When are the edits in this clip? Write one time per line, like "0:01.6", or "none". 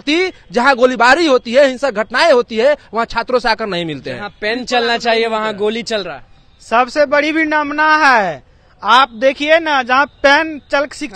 none